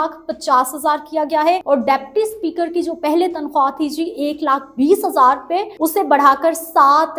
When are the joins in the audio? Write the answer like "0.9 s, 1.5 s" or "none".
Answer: 1.6 s, 5.7 s